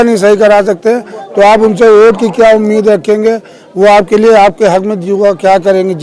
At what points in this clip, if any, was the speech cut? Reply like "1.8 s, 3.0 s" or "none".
none

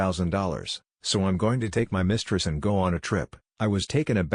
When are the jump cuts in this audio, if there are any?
3.0 s

